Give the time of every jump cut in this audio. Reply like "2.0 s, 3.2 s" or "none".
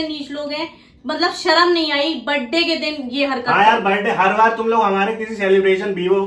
none